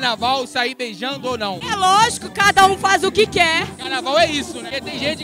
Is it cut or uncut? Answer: uncut